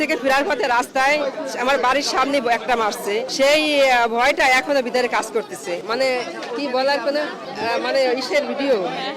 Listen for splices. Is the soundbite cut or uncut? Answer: uncut